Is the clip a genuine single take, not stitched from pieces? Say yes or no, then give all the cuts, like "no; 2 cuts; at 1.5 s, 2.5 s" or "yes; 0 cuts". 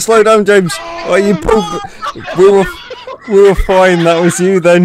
yes; 0 cuts